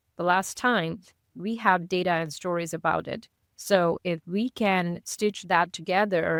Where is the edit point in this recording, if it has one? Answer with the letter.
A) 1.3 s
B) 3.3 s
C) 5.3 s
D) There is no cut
D